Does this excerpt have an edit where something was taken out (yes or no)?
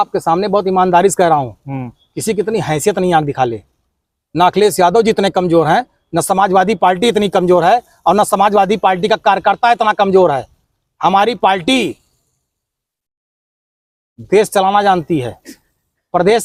no